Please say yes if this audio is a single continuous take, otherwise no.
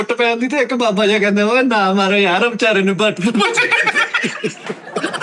yes